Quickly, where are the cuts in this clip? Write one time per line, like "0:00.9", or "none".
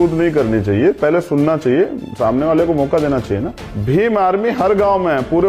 none